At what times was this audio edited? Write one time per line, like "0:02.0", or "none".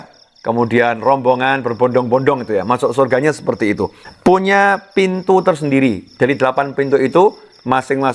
0:04.0